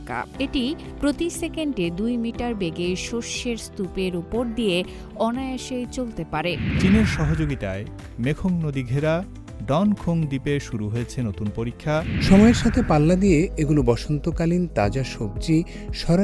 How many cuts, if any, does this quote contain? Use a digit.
2